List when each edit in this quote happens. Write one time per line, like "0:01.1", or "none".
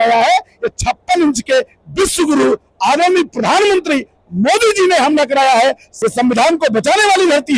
0:05.9